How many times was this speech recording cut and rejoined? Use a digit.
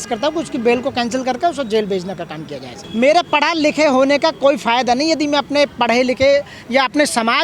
0